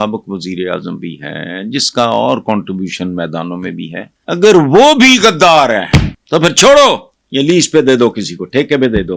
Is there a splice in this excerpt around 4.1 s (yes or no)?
yes